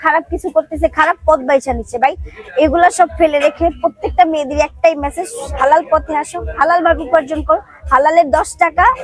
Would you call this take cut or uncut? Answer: uncut